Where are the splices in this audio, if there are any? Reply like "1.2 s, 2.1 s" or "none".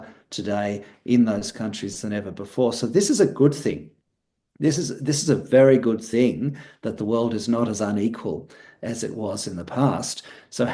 none